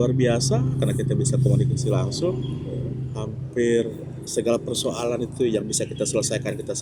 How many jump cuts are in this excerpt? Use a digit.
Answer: 0